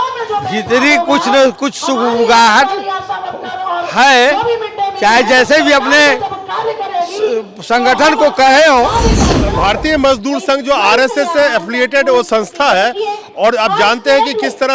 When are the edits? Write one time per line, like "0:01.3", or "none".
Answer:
0:09.5